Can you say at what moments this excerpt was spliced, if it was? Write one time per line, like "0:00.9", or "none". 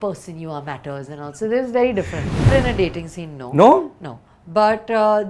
0:02.5